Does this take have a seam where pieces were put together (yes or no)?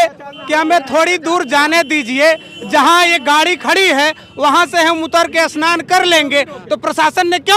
no